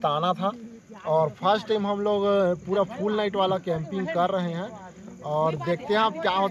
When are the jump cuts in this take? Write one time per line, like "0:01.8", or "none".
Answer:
none